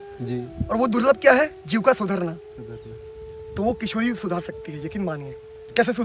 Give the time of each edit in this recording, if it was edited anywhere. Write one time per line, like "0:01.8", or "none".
none